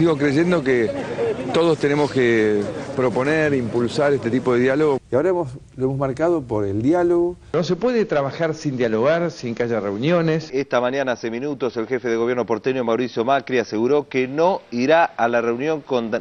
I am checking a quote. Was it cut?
yes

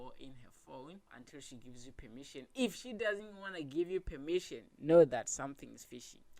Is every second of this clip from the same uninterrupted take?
no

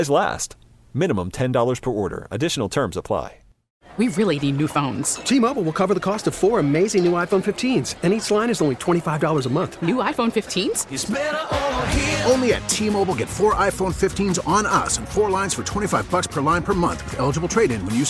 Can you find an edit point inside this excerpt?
yes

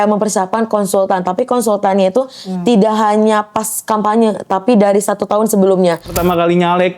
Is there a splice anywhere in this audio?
yes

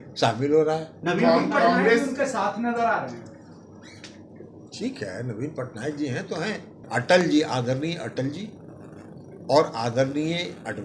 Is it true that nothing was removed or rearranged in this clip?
no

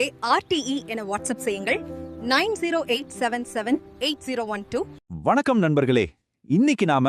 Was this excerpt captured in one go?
no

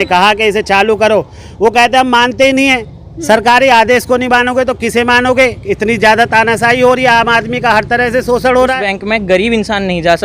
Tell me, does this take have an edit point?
yes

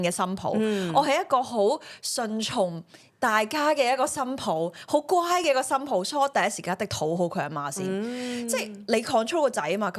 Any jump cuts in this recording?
no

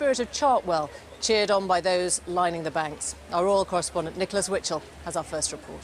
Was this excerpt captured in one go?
no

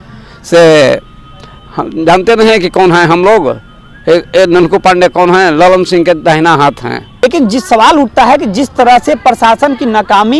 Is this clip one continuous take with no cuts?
no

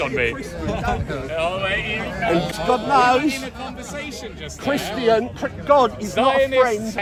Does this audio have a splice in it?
no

